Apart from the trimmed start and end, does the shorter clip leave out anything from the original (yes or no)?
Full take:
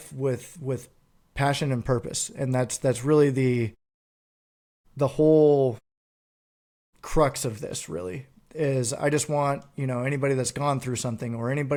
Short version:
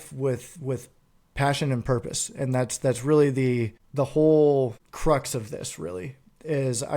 yes